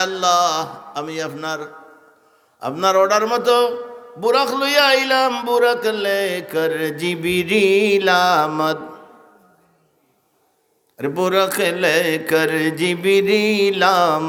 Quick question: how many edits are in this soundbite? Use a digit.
0